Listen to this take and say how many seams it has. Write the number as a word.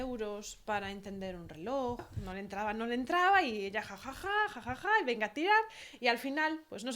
one